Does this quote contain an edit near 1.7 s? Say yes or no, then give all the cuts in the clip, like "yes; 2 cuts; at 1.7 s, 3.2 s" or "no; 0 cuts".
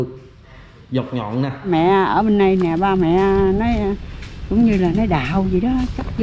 yes; 1 cut; at 1.7 s